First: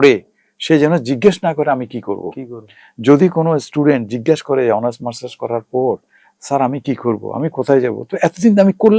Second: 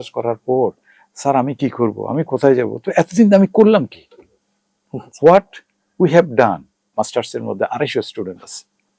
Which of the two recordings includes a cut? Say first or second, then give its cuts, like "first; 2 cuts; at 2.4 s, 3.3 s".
second; 1 cut; at 6.9 s